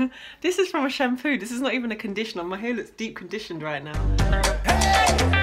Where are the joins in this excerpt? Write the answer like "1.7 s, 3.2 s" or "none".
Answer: 4.2 s